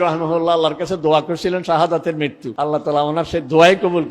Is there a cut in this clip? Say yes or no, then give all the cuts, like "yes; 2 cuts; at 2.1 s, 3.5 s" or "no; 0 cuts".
yes; 1 cut; at 2.4 s